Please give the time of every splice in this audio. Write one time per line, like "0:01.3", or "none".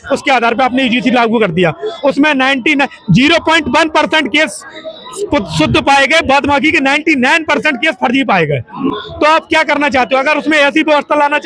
none